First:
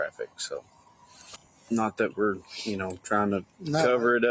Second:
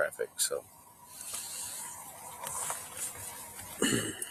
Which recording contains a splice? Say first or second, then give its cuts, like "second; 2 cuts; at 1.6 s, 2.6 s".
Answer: first; 1 cut; at 1.5 s